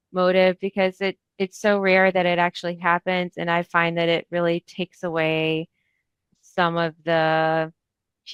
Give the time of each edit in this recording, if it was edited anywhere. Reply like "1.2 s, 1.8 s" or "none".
none